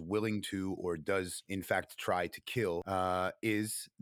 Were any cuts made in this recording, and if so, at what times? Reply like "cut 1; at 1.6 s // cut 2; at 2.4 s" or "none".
cut 1; at 1.4 s // cut 2; at 2.8 s